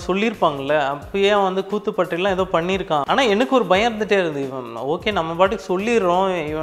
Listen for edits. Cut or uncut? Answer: cut